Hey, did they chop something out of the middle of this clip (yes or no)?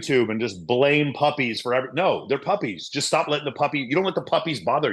no